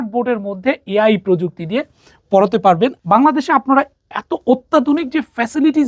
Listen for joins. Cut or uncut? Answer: cut